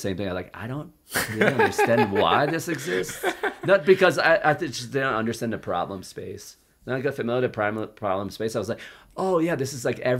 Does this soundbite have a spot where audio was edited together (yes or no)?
no